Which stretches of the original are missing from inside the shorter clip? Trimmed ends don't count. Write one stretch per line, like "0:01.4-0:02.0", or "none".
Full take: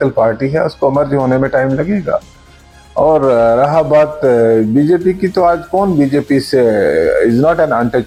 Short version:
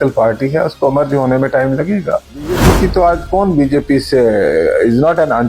0:02.6-0:05.0